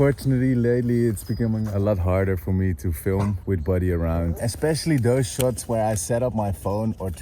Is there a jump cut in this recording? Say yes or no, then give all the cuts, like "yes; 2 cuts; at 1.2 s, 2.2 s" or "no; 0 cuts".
yes; 1 cut; at 4.4 s